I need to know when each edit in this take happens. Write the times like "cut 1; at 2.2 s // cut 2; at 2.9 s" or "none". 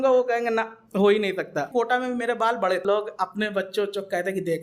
cut 1; at 1.7 s // cut 2; at 2.8 s